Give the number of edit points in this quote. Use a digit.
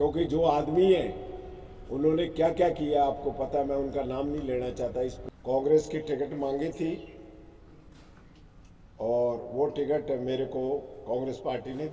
1